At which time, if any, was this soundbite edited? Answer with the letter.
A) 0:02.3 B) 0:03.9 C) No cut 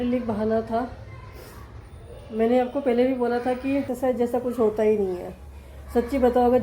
B